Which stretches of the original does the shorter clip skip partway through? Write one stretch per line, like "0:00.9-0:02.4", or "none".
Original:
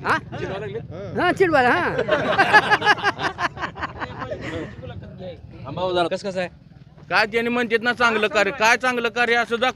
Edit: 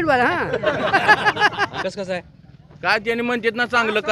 0:03.3-0:06.1